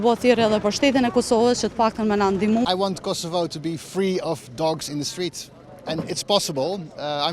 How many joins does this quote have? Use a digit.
1